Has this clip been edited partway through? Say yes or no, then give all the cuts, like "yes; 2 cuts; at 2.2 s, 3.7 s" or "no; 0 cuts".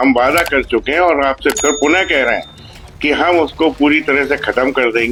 no; 0 cuts